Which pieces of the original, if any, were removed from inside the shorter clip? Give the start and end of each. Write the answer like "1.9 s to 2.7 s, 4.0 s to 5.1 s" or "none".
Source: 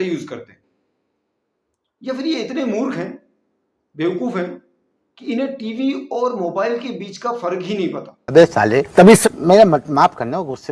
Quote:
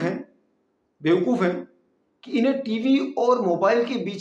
none